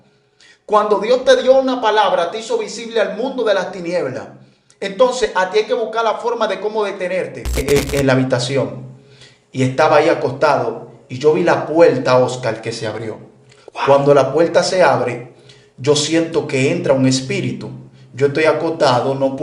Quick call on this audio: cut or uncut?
cut